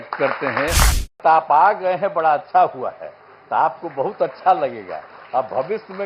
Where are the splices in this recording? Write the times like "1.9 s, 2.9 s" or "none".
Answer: 1.2 s